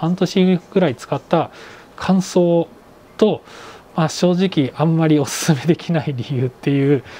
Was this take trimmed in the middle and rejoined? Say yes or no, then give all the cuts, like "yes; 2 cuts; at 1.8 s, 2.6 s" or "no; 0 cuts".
no; 0 cuts